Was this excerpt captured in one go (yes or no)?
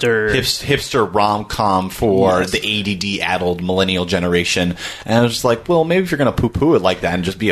yes